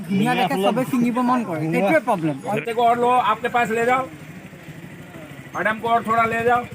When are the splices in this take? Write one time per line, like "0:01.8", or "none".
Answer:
0:02.6